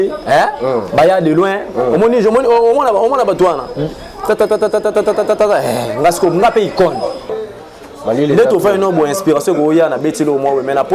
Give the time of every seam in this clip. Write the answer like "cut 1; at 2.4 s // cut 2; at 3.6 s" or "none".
cut 1; at 7.4 s